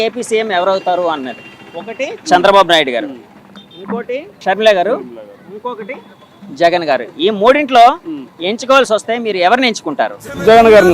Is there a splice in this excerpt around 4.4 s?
yes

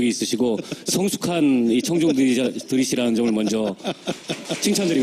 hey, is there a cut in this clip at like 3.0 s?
yes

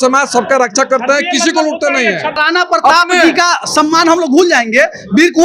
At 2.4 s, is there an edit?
yes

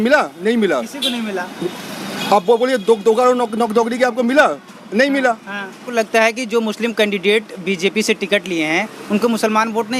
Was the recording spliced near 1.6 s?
no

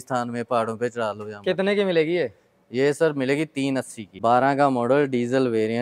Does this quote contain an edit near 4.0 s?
yes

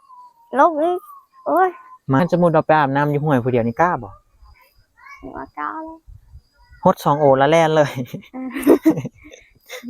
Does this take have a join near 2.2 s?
yes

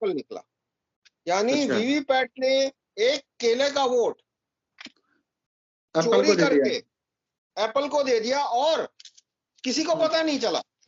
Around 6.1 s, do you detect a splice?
no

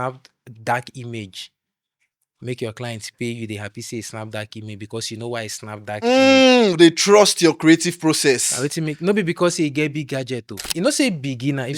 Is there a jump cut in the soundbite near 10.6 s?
yes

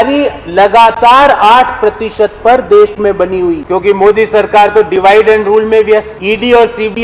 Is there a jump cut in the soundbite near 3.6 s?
yes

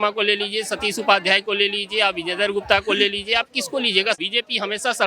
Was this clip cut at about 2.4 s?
no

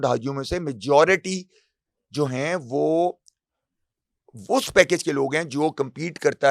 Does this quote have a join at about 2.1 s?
no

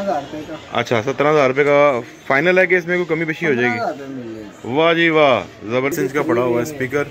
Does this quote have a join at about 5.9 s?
yes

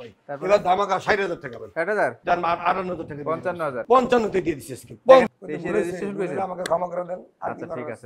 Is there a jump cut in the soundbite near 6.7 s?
no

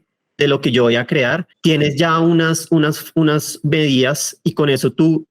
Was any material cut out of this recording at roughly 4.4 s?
no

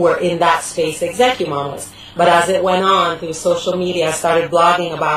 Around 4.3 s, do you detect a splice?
no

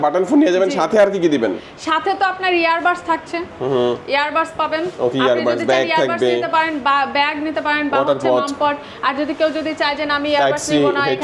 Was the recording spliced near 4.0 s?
no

